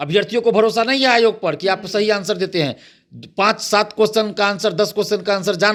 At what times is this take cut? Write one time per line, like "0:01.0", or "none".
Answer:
none